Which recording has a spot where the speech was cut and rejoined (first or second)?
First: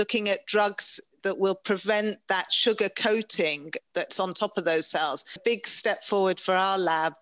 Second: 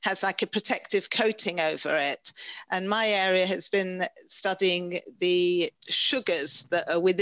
first